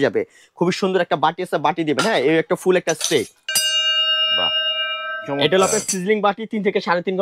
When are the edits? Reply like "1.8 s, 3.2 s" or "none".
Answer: 3.4 s